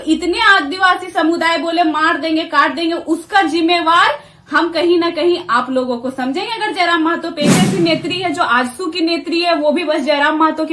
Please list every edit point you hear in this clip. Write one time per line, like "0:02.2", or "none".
0:07.6